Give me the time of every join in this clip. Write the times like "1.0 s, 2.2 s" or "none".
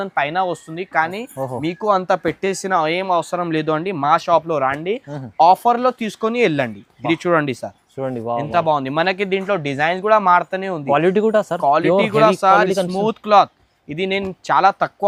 none

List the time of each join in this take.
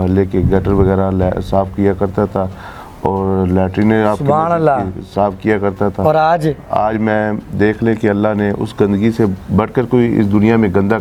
none

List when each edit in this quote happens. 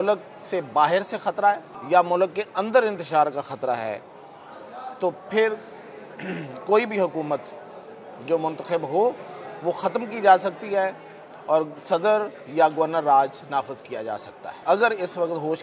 1.7 s, 14.6 s

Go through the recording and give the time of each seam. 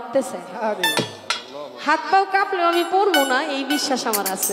none

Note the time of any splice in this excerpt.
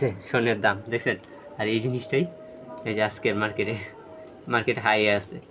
none

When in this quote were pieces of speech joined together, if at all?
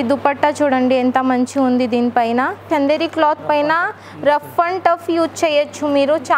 2.7 s

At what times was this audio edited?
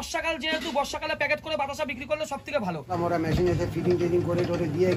2.9 s

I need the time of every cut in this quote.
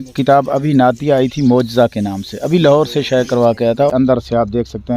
3.9 s

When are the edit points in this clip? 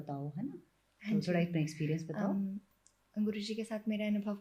none

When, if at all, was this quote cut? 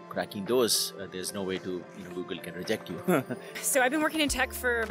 3.6 s

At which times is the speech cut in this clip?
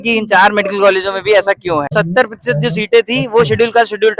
1.9 s

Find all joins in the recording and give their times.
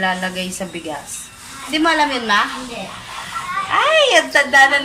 1.7 s

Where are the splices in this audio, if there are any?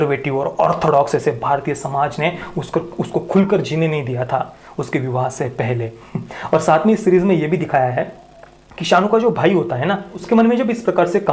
none

